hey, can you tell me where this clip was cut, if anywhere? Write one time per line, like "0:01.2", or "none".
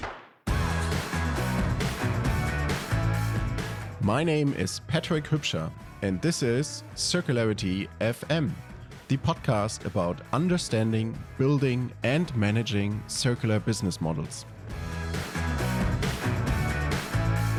none